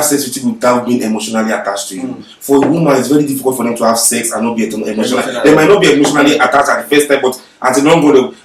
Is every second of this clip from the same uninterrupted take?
yes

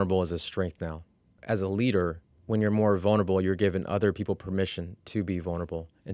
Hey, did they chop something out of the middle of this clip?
yes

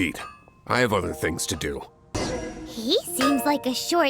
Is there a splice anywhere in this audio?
yes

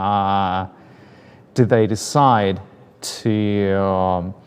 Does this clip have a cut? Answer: no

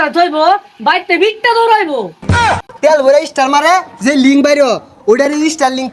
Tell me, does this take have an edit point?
yes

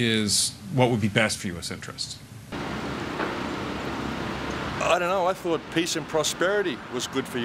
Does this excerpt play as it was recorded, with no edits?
yes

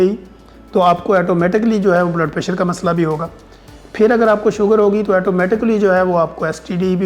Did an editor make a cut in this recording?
no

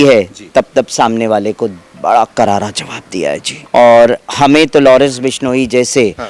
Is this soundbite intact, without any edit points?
no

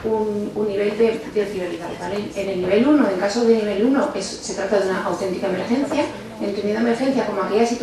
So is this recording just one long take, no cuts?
no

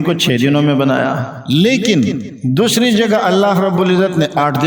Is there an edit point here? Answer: no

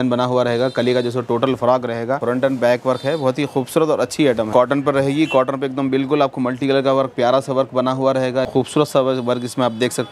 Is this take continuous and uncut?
no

